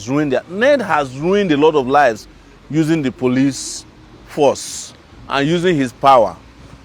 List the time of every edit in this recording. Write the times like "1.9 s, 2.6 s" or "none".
none